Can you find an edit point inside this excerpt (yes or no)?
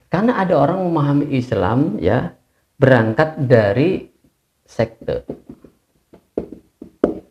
no